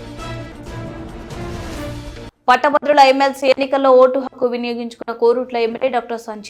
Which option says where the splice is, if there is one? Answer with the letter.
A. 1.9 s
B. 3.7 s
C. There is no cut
C